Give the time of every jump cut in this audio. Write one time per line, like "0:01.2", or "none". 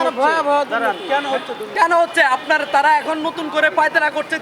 0:01.6